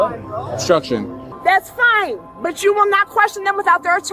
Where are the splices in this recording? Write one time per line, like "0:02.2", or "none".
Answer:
0:01.3